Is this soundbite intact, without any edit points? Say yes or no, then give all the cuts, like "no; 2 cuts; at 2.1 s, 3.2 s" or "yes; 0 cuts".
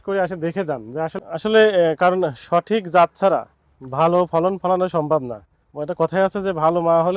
no; 1 cut; at 1.1 s